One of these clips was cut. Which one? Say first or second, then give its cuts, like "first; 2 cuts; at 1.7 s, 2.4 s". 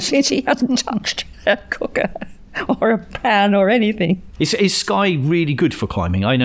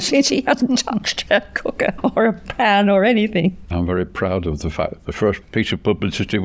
second; 3 cuts; at 1.1 s, 2.0 s, 3.7 s